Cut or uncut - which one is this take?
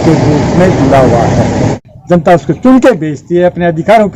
cut